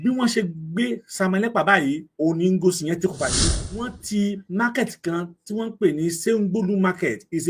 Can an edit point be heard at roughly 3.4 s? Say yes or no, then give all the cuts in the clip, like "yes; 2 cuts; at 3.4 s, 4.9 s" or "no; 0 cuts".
yes; 1 cut; at 3.4 s